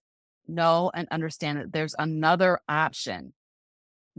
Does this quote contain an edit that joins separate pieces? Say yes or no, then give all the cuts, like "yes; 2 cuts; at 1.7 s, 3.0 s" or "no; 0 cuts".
no; 0 cuts